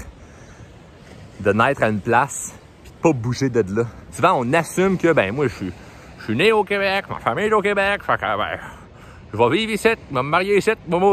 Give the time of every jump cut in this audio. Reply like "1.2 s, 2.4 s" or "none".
4.0 s